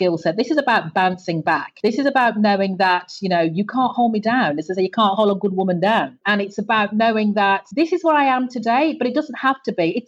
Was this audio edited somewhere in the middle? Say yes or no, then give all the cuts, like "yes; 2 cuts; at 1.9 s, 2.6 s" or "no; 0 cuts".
no; 0 cuts